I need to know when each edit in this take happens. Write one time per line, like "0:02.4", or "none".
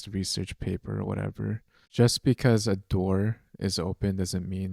0:01.9